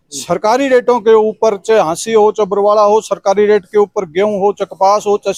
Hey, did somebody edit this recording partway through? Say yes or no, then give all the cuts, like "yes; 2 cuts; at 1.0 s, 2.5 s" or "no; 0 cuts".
no; 0 cuts